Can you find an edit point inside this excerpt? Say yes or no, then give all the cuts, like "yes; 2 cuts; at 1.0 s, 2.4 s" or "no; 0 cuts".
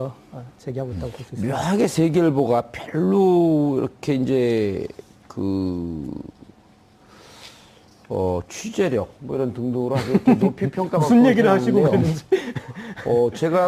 yes; 1 cut; at 4.4 s